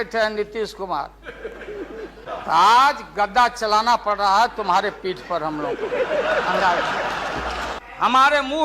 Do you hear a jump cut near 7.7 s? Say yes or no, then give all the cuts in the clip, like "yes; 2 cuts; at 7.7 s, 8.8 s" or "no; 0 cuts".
yes; 2 cuts; at 2.2 s, 7.7 s